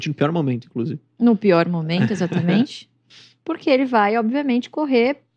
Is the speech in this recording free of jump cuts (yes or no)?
yes